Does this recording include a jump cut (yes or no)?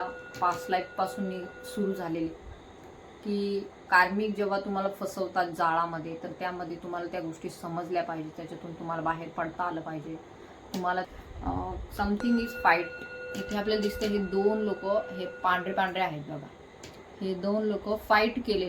yes